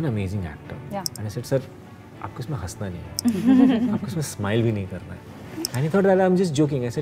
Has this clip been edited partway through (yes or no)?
yes